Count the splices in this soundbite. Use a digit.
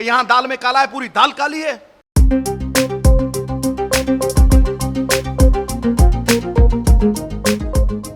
0